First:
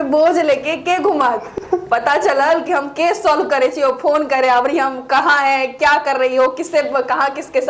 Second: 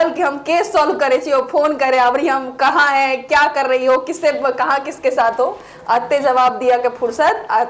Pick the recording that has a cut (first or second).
first